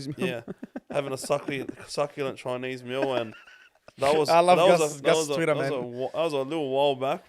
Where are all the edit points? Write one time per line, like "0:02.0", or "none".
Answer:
none

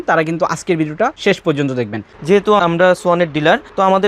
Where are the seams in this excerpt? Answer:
0:01.2
0:02.2

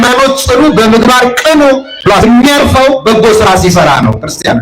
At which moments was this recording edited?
0:02.2

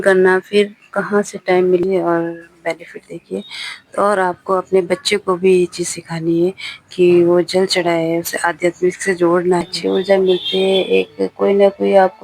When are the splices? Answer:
0:01.8
0:09.7

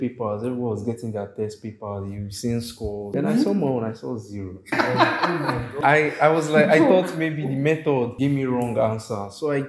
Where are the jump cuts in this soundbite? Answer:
0:03.1
0:04.7
0:05.8
0:08.1

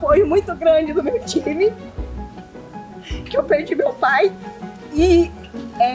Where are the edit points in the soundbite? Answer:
none

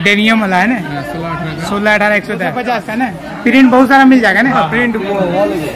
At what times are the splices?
0:02.7

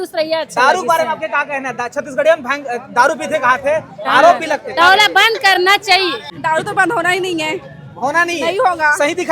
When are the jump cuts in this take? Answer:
0:06.3

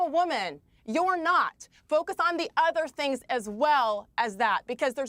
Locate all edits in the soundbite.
none

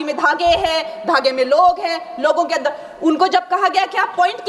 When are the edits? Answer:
none

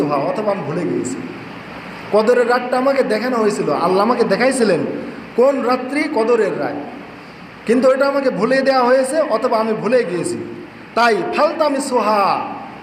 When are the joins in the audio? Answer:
none

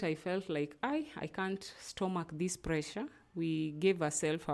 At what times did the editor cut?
none

